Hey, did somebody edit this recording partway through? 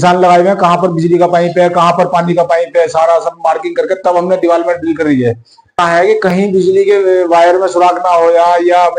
no; 0 cuts

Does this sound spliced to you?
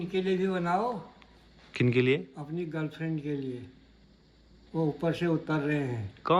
no; 0 cuts

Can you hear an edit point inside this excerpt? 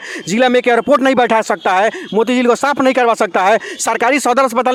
no; 0 cuts

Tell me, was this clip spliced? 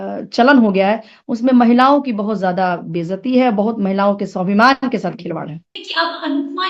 yes; 1 cut; at 5.8 s

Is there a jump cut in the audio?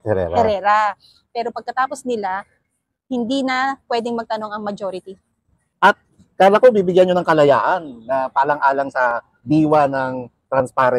yes; 1 cut; at 5.6 s

